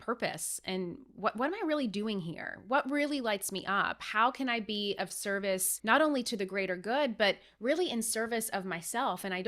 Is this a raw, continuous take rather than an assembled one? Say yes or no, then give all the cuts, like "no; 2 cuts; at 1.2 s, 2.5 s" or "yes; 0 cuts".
no; 1 cut; at 5.7 s